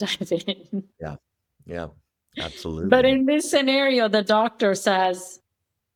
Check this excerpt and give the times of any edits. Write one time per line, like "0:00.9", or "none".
none